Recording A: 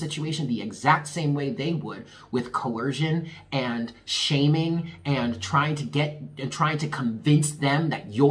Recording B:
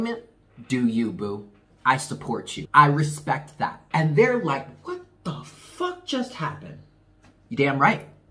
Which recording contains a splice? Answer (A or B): B